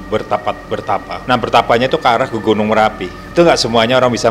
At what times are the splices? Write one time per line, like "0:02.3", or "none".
0:01.1
0:03.2